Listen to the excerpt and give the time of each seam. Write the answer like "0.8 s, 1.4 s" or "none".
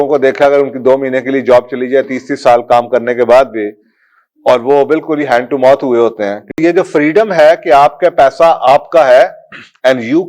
6.6 s